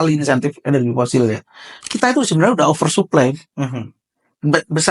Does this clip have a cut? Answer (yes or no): yes